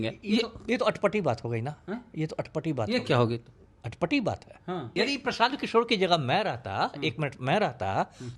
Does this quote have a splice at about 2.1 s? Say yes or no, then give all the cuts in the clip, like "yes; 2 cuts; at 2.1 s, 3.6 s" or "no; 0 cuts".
no; 1 cut; at 4.9 s